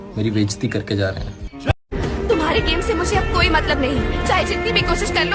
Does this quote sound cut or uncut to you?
uncut